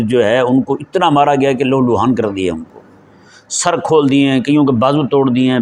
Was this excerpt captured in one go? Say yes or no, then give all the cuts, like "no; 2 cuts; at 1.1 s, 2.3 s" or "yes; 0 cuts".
yes; 0 cuts